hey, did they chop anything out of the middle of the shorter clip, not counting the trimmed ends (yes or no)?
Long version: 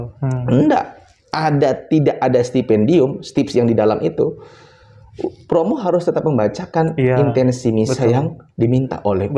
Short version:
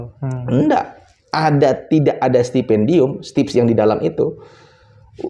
no